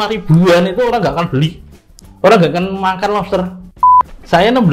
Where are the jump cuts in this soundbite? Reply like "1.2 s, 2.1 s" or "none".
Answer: 3.6 s